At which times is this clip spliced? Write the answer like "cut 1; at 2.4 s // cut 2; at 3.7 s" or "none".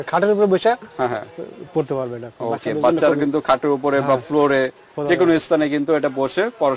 none